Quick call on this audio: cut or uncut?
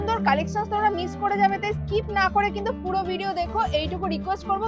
uncut